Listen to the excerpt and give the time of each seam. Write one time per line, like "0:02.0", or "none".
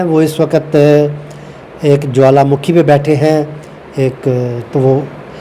none